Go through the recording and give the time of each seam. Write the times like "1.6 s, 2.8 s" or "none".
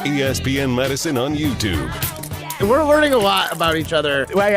2.5 s